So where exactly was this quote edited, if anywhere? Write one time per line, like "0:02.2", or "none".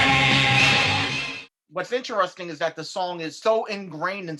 0:01.1
0:03.3